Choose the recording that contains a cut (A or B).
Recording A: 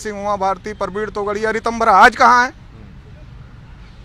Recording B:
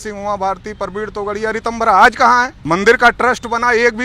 B